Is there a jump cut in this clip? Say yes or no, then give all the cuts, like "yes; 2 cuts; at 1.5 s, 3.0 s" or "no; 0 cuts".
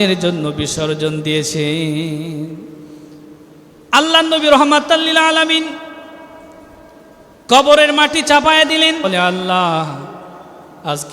yes; 1 cut; at 9.0 s